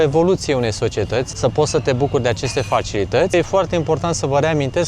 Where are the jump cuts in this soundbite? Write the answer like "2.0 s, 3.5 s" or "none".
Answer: 1.3 s, 3.3 s